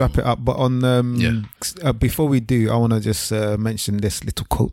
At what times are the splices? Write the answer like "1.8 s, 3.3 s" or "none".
1.5 s

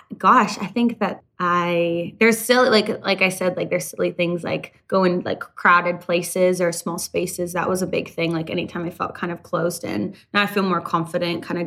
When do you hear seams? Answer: 1.2 s

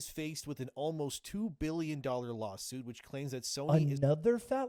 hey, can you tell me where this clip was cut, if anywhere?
none

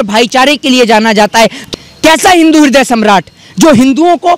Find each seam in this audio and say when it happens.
1.7 s

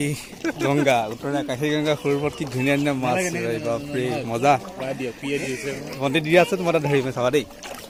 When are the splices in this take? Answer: none

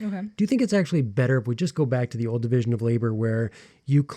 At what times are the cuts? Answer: none

